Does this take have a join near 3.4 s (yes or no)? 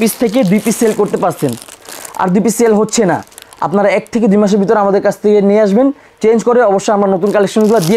no